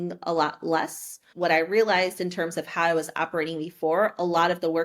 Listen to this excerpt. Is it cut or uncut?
cut